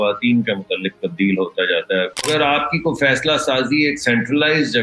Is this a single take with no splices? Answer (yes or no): no